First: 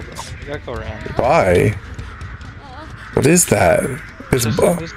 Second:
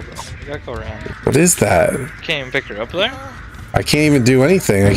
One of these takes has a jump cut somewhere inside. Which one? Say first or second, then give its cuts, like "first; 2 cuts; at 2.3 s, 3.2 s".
second; 2 cuts; at 1.1 s, 2.2 s